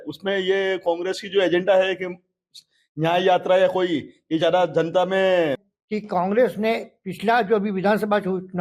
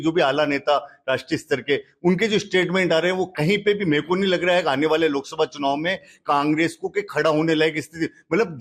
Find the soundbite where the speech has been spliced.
first; 1 cut; at 5.7 s

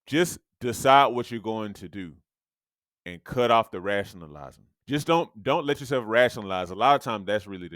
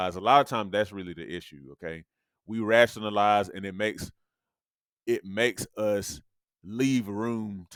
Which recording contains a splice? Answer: first; 1 cut; at 4.7 s

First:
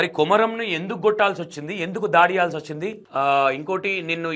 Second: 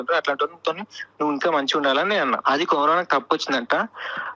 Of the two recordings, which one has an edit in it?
second; 1 cut; at 2.4 s

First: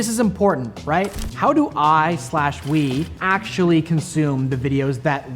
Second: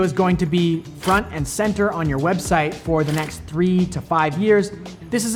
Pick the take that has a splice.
first; 2 cuts; at 1.2 s, 3.2 s

